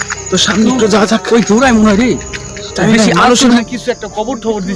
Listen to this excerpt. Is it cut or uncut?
cut